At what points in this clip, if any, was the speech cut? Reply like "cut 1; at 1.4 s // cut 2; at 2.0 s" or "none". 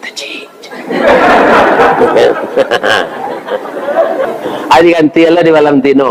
cut 1; at 4.3 s